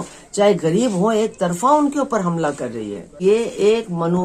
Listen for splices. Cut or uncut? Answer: cut